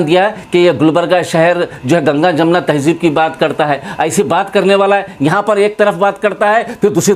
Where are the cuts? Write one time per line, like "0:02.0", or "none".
none